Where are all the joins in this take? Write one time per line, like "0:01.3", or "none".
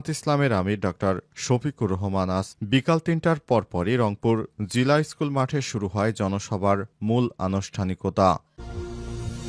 0:08.5

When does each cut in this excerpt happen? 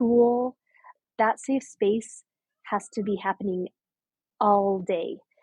0:01.0

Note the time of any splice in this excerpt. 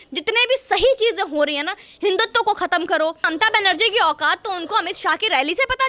0:03.3

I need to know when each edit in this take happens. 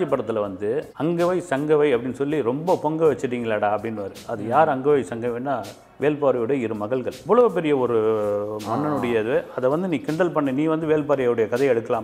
0:07.1

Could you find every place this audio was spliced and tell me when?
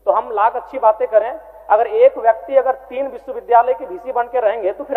none

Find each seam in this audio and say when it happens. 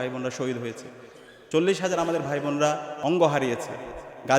0:02.9

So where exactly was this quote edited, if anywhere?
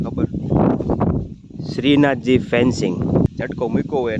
0:03.3

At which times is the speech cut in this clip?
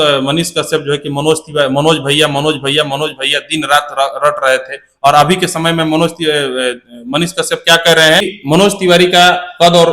0:08.3

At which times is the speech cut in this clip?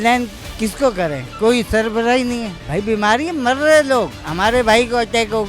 none

